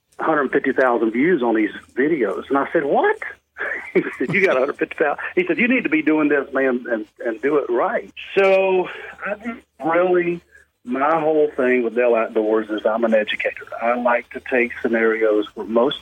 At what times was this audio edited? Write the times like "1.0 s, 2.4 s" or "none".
8.2 s